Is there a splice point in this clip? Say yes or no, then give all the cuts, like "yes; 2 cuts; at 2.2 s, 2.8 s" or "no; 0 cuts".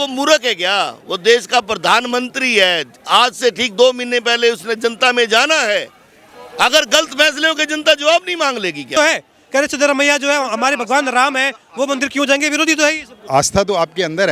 yes; 1 cut; at 9.0 s